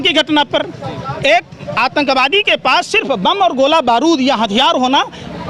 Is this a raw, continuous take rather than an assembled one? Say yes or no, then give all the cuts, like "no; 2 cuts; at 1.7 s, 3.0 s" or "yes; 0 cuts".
yes; 0 cuts